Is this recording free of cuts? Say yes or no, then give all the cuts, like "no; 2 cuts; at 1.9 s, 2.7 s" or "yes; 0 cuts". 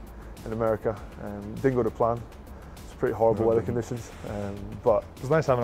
yes; 0 cuts